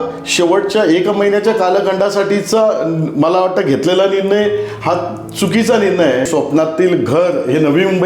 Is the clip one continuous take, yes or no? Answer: no